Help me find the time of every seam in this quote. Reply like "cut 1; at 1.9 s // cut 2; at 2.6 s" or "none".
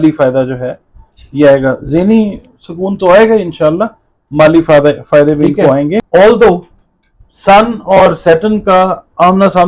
cut 1; at 6.1 s